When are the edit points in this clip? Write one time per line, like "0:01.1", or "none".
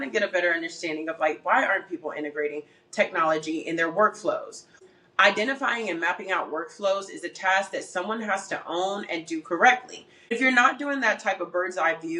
0:04.8
0:10.3